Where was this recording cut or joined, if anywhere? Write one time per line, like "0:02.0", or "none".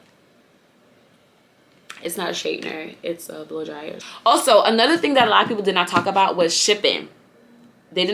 0:04.0